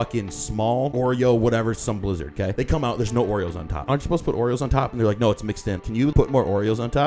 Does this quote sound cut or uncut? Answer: cut